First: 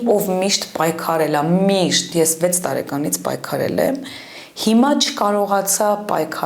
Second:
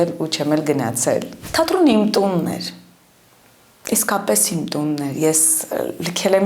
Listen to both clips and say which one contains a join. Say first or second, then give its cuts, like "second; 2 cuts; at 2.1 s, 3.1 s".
second; 1 cut; at 1.4 s